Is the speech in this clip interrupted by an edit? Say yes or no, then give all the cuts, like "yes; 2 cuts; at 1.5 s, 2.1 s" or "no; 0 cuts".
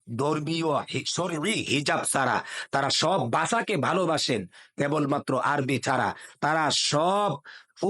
no; 0 cuts